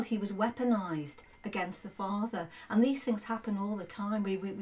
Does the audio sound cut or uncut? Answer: uncut